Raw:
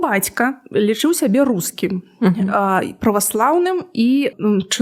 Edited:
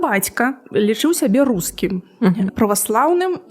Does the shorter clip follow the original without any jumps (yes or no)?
no